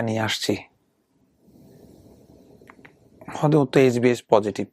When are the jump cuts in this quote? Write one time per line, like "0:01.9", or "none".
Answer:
0:01.3